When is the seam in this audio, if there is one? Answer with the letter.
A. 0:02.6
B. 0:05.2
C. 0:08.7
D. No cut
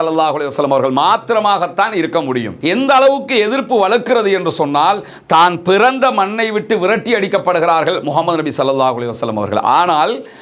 A